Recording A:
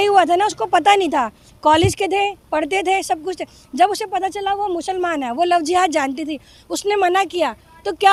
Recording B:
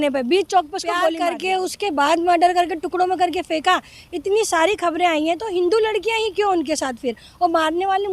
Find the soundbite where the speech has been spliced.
B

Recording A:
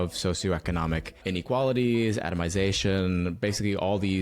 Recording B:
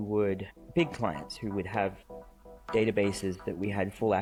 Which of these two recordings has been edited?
A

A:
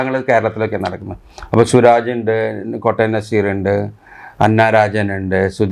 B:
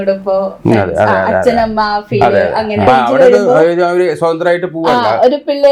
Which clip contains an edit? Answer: B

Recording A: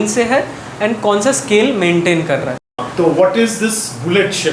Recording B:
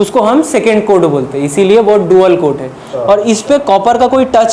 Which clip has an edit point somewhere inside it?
A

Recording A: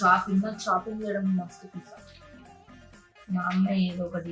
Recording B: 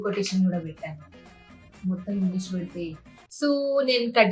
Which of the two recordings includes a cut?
B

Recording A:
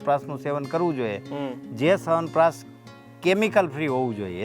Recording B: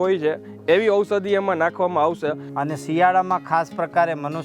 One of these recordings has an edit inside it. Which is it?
B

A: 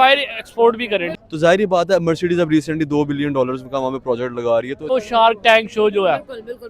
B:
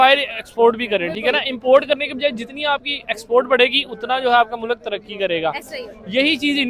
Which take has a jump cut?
A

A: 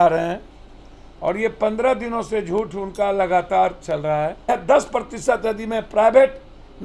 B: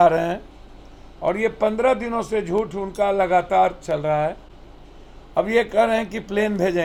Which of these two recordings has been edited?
A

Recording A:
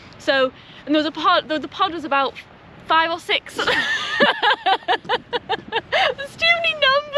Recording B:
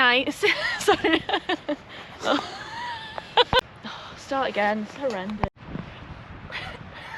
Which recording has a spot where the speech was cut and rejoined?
B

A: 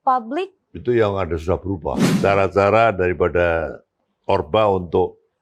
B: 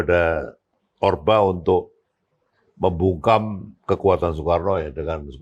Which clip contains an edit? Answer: A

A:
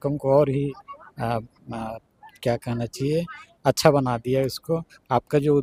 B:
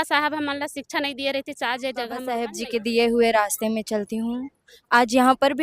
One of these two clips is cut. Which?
B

